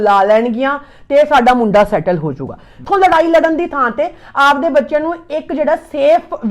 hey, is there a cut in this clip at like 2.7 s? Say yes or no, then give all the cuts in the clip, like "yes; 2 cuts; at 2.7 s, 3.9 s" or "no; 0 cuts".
yes; 1 cut; at 2.7 s